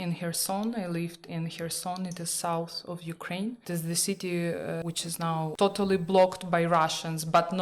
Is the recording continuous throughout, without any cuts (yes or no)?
no